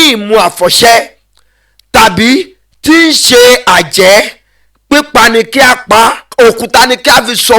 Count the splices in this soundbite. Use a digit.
1